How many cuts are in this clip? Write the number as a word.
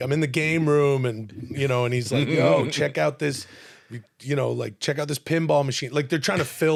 zero